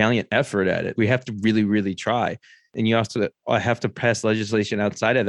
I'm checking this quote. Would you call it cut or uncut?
cut